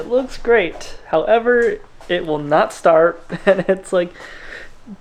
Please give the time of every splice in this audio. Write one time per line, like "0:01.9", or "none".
none